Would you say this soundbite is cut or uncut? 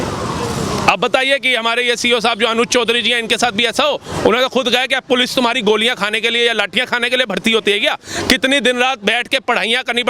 uncut